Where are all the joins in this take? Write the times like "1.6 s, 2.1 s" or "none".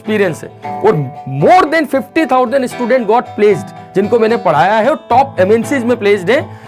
none